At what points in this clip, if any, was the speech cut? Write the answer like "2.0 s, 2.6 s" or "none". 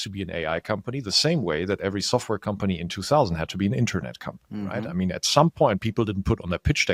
none